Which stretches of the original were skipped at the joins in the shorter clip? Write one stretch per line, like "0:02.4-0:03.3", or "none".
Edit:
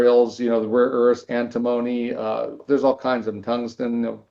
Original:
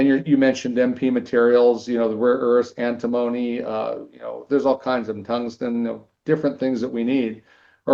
0:04.1-0:04.4